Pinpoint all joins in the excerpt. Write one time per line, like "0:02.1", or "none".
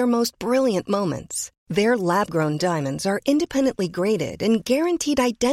none